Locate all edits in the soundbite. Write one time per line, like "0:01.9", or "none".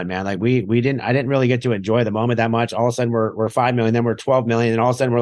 none